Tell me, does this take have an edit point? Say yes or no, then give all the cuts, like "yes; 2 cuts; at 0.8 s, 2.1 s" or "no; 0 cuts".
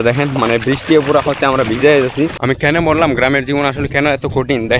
yes; 1 cut; at 2.4 s